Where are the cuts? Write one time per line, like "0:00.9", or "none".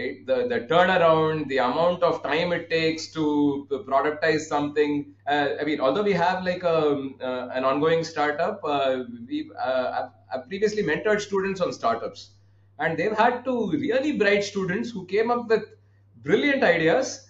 0:05.1